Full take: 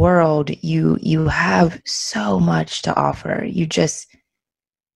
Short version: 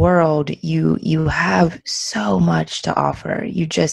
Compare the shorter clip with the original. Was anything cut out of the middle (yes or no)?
no